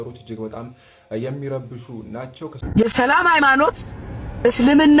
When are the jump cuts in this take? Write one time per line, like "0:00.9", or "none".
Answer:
0:02.6